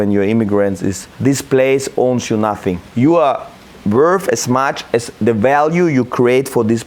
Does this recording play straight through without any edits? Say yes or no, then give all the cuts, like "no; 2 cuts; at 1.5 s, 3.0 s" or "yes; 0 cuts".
no; 3 cuts; at 1.0 s, 2.8 s, 5.1 s